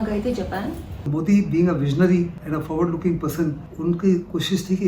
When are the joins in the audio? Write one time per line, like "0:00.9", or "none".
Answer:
0:01.1
0:02.4
0:03.7